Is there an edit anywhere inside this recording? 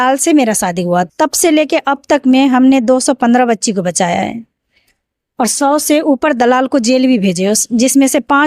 yes; 1 cut; at 1.1 s

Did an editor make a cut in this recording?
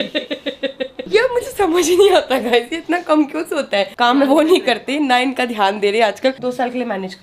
yes; 3 cuts; at 1.0 s, 4.0 s, 6.4 s

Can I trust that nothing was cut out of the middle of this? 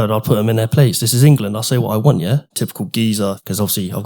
no; 1 cut; at 3.0 s

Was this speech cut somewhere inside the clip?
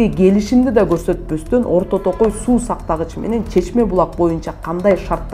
no; 0 cuts

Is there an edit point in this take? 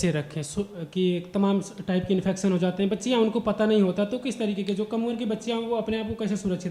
no; 0 cuts

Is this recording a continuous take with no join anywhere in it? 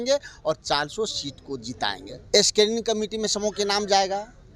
no; 1 cut; at 2.1 s

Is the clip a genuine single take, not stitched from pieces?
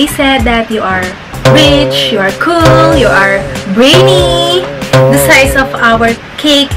no; 1 cut; at 4.8 s

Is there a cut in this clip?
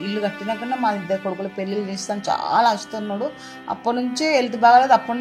no; 0 cuts

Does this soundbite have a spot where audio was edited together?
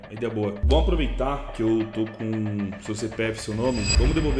no; 0 cuts

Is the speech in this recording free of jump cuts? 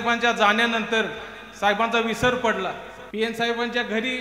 no; 1 cut; at 2.9 s

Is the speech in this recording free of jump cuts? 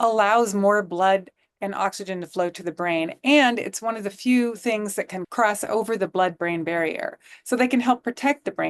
no; 1 cut; at 5.1 s

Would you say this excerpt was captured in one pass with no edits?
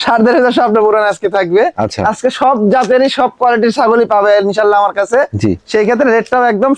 yes; 0 cuts

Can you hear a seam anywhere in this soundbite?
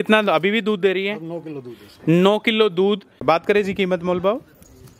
yes; 1 cut; at 3.2 s

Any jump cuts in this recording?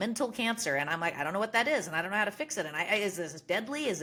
no; 0 cuts

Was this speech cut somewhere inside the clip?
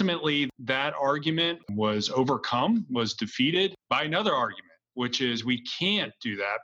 yes; 1 cut; at 1.6 s

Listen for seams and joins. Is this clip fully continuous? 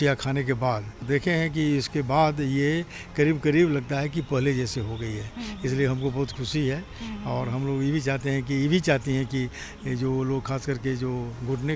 no; 1 cut; at 1.0 s

